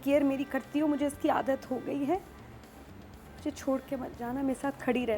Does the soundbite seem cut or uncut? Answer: uncut